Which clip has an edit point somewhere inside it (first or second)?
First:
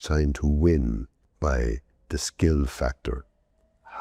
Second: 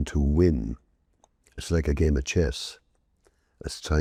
first